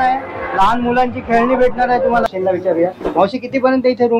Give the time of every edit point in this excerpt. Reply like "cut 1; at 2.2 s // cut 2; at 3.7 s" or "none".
cut 1; at 2.3 s